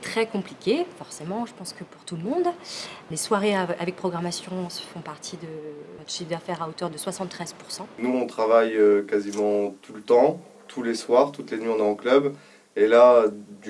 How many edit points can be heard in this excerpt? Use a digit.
3